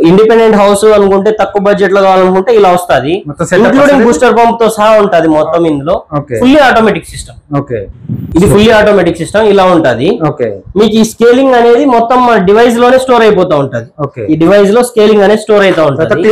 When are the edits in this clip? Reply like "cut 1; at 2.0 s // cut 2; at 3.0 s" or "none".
none

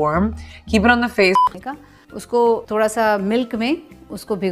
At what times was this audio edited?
cut 1; at 1.4 s

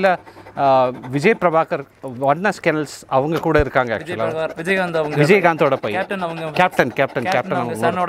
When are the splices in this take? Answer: none

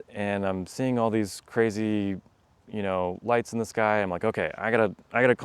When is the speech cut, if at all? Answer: none

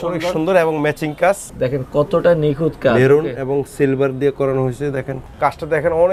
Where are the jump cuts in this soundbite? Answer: cut 1; at 1.5 s // cut 2; at 5.2 s

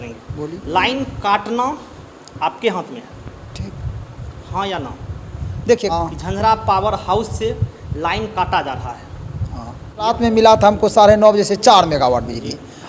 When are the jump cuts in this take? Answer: cut 1; at 5.9 s // cut 2; at 10.1 s

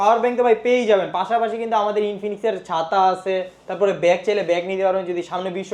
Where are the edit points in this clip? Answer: none

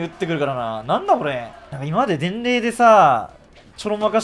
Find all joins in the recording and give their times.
cut 1; at 1.8 s

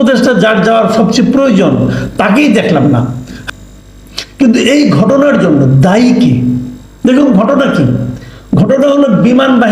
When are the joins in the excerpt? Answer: cut 1; at 3.3 s

